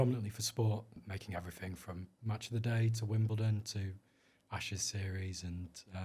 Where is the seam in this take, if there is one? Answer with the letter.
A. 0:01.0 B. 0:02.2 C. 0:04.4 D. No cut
A